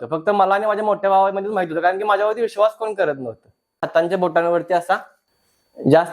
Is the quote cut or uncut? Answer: cut